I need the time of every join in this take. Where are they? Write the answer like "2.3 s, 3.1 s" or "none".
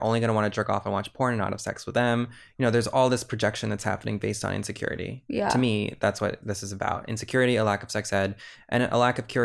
none